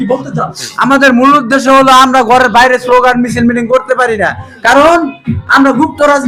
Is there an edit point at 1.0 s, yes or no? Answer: no